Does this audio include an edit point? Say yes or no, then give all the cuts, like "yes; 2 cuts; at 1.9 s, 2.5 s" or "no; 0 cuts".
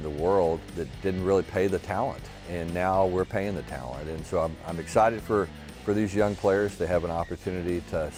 no; 0 cuts